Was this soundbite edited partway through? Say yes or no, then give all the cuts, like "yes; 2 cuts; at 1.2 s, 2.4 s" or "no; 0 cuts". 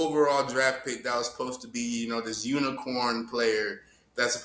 no; 0 cuts